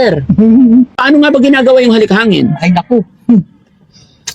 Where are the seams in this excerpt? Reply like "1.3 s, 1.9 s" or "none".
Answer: 1.0 s